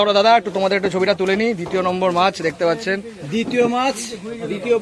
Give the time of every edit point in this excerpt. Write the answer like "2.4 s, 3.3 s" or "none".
none